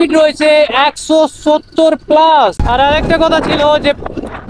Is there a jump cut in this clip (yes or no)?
yes